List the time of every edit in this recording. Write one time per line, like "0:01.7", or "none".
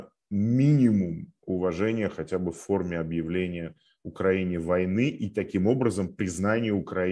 none